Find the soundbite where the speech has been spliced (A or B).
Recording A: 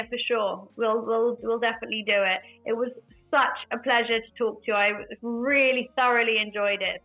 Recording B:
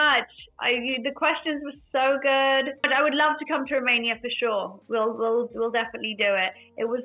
B